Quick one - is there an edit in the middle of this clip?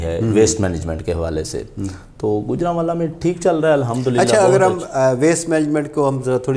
no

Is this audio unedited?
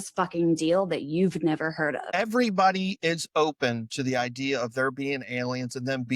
no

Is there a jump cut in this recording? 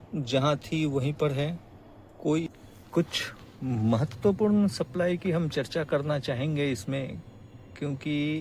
yes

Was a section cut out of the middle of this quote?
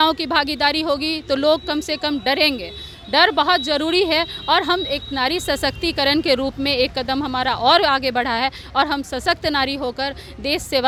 no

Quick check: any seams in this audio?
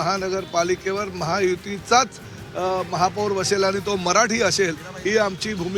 no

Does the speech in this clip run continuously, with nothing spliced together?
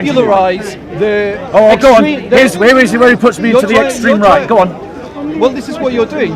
yes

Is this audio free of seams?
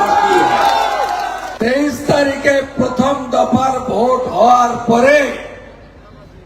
no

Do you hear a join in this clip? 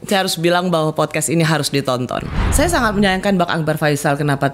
yes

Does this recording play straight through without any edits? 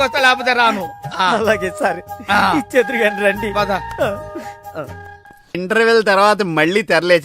no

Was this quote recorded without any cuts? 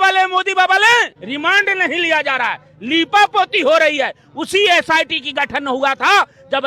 no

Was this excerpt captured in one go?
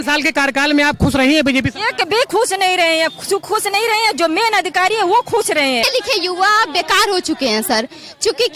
no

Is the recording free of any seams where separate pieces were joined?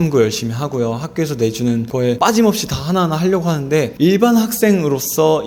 no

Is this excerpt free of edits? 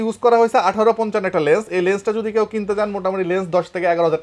yes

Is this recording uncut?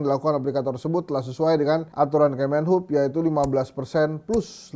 yes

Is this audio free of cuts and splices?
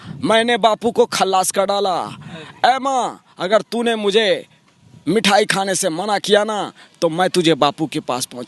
yes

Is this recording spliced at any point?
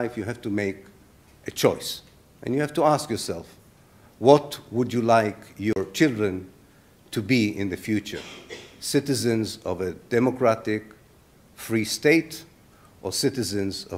no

